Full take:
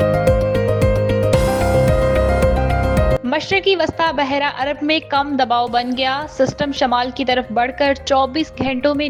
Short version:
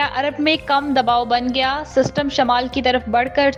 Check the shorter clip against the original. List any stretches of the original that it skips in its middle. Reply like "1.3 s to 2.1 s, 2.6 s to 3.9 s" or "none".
none